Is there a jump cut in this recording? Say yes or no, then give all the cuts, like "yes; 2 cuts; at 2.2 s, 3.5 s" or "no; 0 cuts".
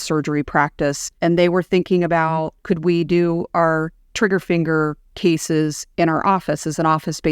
yes; 2 cuts; at 1.1 s, 2.5 s